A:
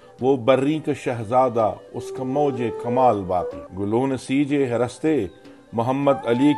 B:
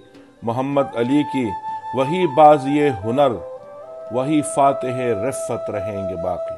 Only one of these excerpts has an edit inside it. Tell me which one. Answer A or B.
A